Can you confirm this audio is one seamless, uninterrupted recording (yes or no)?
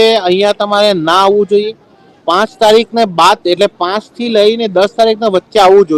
yes